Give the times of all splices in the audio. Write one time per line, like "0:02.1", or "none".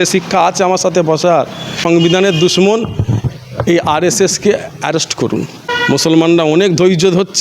0:01.7
0:05.7